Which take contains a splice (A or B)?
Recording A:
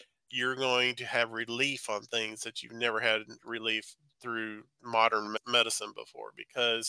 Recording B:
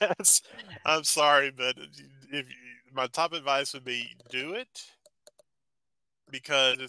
A